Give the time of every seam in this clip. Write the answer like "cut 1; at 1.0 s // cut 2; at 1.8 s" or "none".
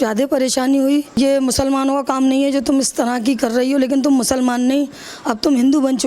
cut 1; at 1.1 s